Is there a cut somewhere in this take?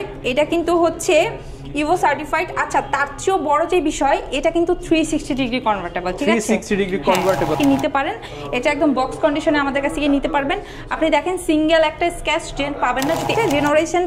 yes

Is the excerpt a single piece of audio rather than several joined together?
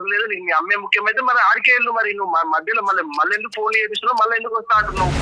yes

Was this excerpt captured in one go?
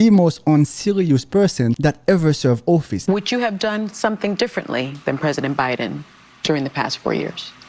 no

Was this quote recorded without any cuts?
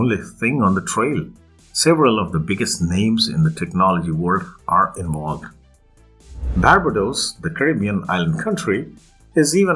no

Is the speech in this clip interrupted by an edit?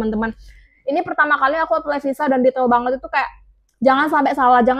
no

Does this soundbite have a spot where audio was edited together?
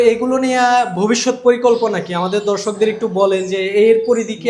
no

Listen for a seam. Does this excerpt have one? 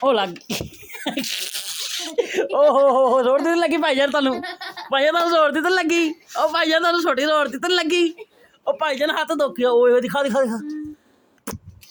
no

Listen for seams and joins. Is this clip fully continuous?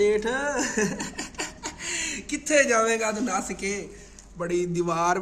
yes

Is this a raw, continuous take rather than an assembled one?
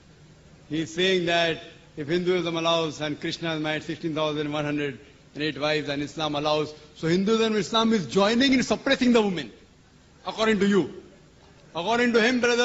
yes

